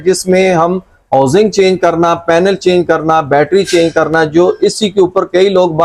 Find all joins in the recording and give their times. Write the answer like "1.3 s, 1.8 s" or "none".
none